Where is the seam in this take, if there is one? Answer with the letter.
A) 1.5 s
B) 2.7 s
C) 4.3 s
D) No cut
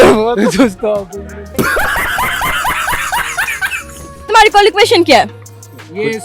C